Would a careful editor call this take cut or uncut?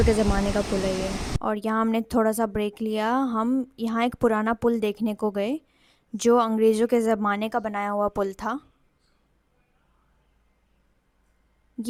uncut